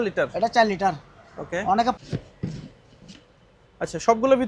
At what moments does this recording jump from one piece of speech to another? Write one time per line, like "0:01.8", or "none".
0:02.0